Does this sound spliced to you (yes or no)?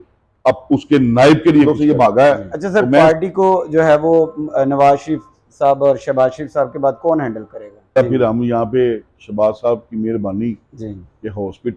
yes